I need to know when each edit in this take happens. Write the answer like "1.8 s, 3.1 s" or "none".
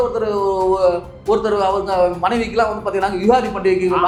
none